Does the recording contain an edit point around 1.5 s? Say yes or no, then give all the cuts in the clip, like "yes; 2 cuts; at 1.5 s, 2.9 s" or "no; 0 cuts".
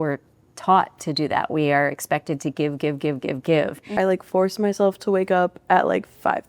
no; 1 cut; at 4.0 s